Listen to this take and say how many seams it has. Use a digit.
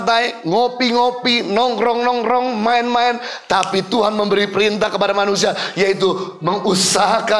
0